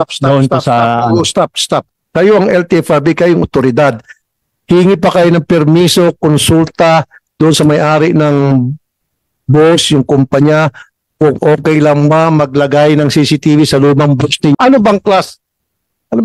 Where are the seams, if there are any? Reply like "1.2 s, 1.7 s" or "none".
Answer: 2.0 s, 14.5 s